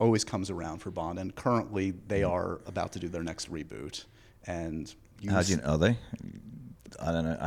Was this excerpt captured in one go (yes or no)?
yes